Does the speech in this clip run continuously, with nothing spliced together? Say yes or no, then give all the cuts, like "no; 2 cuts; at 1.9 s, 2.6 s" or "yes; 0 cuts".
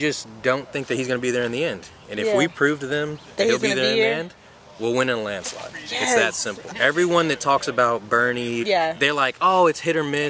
no; 2 cuts; at 6.7 s, 8.6 s